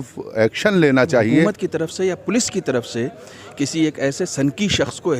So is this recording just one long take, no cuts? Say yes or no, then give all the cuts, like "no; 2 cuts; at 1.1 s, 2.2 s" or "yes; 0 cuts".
no; 1 cut; at 1.5 s